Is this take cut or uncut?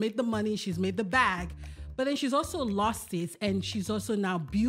uncut